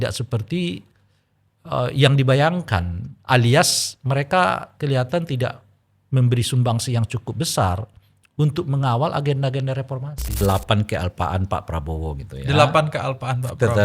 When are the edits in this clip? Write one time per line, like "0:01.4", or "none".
0:10.4